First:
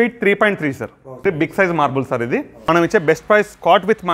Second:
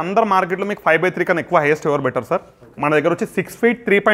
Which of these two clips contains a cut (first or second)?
first